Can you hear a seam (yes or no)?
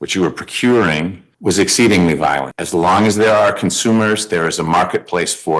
yes